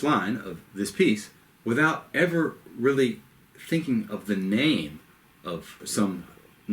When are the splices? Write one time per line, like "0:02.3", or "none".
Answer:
0:05.8